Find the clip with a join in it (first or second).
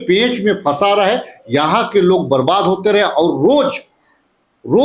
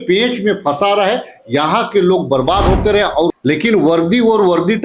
second